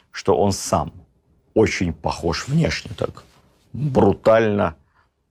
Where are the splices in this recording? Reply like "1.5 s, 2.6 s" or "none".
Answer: none